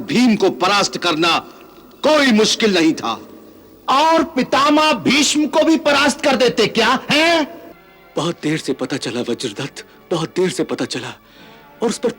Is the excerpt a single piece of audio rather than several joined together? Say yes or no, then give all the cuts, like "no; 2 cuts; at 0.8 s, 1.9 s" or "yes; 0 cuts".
no; 1 cut; at 7.7 s